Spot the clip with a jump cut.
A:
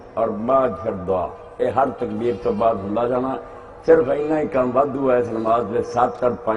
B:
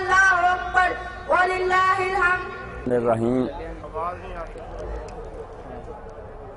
A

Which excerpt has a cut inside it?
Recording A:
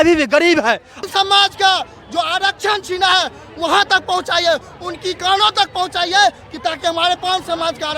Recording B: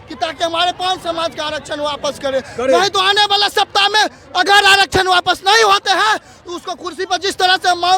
A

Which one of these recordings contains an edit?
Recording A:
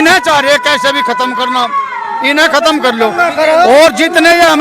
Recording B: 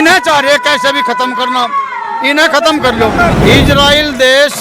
B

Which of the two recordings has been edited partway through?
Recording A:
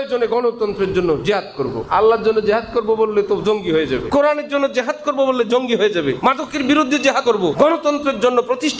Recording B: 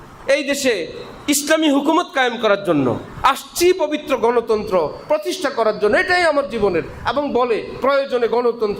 A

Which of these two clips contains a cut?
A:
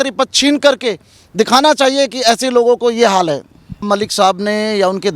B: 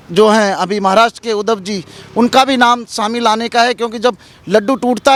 A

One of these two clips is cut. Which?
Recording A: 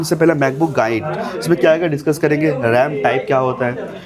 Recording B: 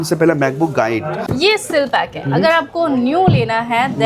B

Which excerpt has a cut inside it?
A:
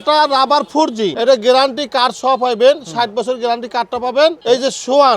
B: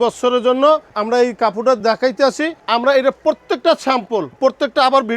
A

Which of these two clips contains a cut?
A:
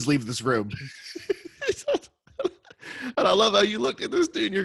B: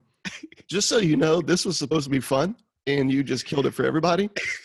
B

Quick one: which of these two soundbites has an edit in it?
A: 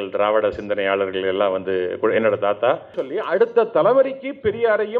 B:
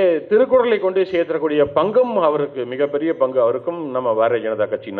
A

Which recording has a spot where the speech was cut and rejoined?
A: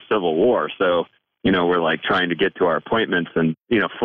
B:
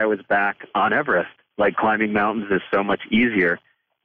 B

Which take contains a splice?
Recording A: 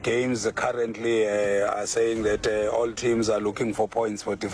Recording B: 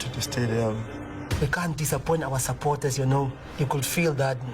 B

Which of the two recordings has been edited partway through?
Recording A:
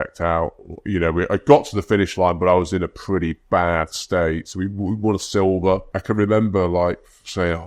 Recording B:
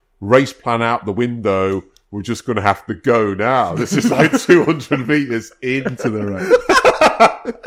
A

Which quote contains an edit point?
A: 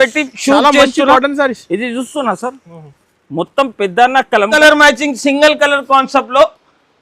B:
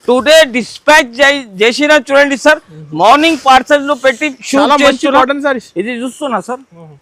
A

